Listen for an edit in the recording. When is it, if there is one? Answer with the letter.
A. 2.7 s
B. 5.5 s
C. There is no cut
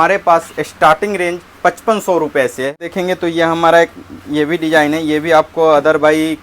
A